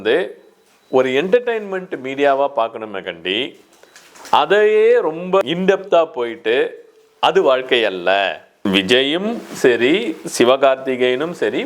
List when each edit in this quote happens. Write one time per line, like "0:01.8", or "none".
0:08.6